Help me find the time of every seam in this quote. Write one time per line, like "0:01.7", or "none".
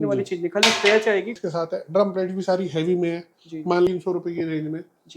0:01.4
0:03.9

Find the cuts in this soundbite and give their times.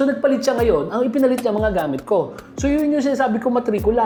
none

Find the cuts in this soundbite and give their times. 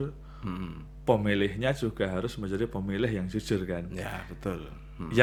none

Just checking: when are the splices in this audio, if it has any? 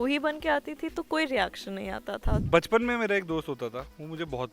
0:02.4

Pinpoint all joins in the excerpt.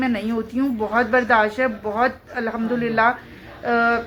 none

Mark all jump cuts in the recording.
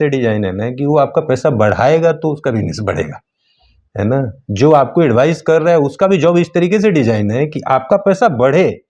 none

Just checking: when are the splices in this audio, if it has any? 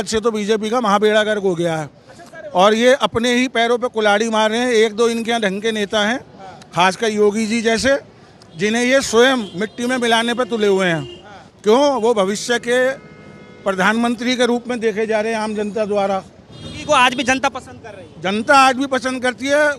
none

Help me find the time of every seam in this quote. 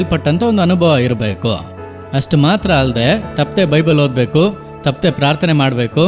none

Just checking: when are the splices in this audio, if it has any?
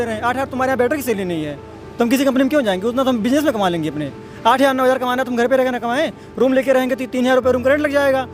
none

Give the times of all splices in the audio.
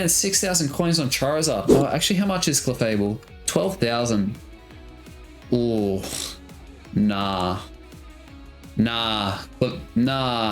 0:01.7

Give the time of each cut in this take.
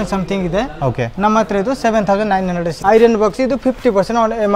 0:02.7

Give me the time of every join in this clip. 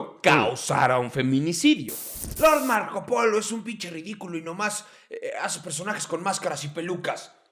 0:01.9

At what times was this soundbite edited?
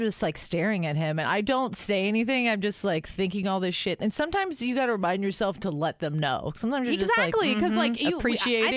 none

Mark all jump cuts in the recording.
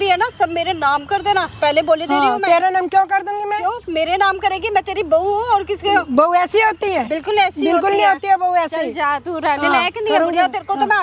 none

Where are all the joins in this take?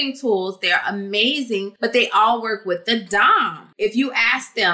0:01.7
0:03.7

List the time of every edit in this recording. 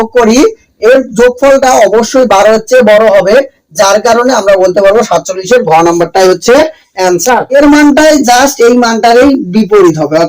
0:07.5

